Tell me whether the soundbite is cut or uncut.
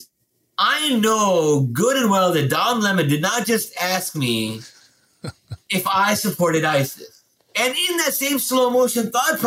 uncut